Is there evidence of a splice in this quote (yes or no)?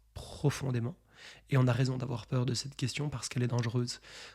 no